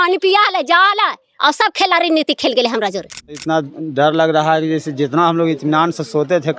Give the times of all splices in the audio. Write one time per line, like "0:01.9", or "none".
0:03.4